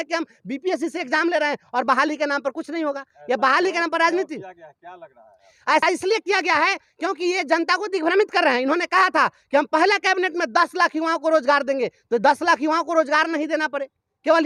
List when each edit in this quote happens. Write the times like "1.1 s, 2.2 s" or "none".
none